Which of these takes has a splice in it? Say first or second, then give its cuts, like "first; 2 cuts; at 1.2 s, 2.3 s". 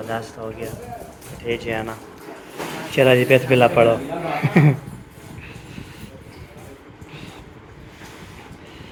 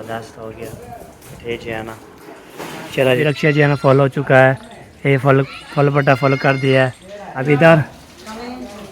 second; 2 cuts; at 3.2 s, 7.3 s